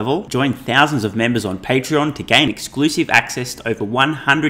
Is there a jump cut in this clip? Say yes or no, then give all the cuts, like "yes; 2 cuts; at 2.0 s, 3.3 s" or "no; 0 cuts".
no; 0 cuts